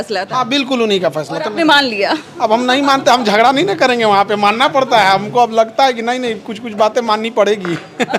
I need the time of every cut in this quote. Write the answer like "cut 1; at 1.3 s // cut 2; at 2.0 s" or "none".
none

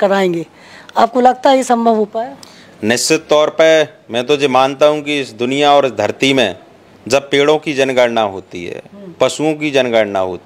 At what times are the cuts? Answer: none

